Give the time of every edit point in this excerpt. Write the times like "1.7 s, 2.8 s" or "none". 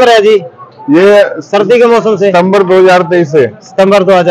none

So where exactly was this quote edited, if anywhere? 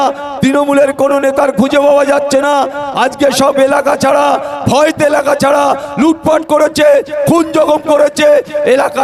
none

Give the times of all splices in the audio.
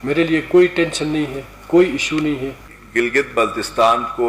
2.5 s

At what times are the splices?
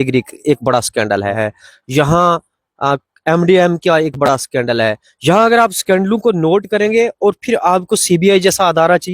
1.4 s

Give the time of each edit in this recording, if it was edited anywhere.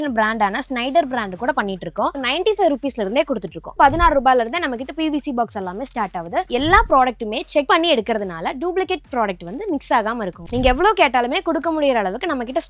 2.1 s, 3.6 s, 6.5 s, 7.7 s, 10.4 s

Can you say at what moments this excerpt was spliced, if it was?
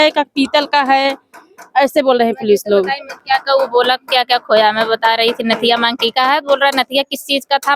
none

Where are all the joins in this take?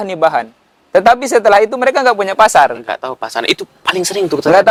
none

